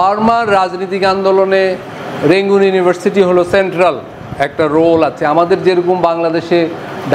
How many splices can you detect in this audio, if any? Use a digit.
0